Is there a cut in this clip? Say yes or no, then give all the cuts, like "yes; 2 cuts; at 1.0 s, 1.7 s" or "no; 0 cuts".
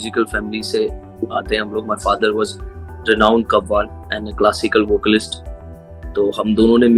no; 0 cuts